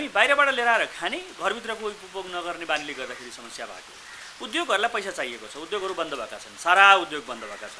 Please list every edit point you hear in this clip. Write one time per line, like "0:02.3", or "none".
none